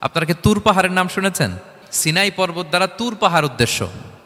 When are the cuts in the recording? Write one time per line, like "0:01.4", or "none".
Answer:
0:01.8